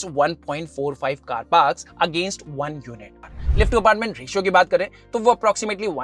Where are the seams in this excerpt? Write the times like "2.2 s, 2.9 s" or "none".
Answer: 3.2 s